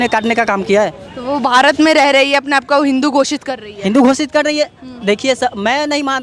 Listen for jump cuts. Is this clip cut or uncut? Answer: uncut